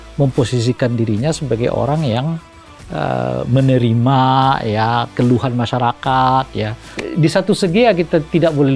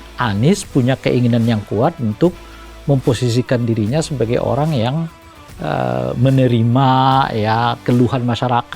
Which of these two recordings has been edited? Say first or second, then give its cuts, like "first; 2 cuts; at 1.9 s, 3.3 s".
first; 1 cut; at 7.0 s